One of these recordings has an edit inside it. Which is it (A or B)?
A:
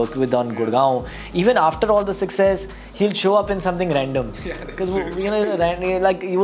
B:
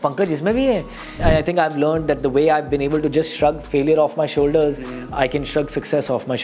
B